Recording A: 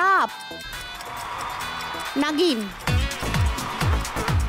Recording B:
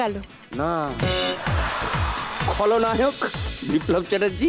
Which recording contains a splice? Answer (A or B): B